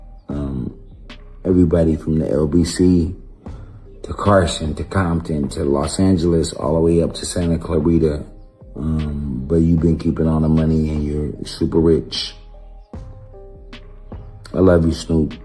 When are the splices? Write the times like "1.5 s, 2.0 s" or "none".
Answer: 12.6 s, 14.2 s